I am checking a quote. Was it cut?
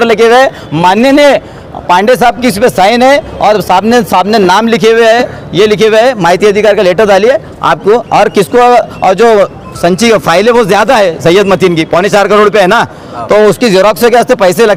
no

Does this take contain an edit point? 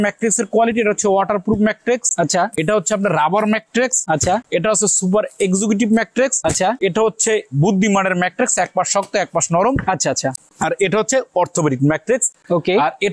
no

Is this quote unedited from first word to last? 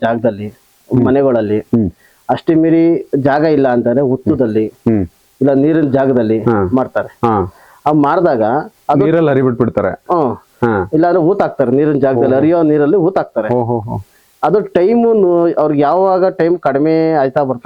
yes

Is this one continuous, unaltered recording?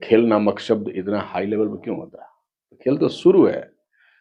yes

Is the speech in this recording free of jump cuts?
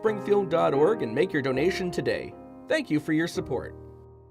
yes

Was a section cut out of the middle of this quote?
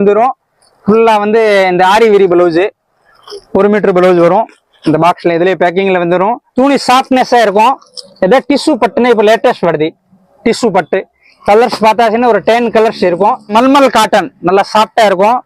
yes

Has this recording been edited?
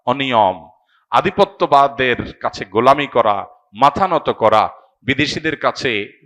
no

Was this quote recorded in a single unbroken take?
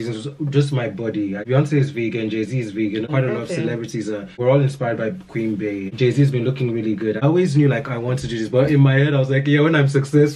no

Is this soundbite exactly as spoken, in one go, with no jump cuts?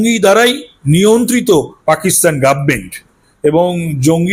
yes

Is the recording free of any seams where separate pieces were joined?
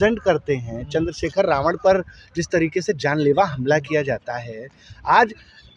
yes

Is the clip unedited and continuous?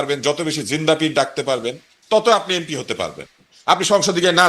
no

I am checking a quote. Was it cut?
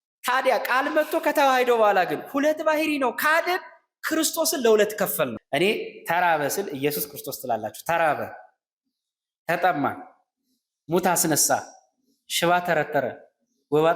yes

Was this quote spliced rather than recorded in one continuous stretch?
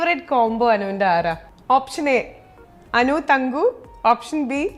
no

